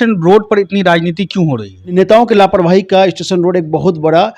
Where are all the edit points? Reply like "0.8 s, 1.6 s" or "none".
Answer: 1.9 s